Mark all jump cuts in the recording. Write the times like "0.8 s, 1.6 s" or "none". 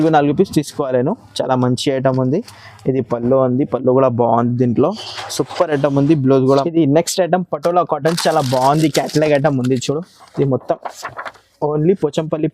6.6 s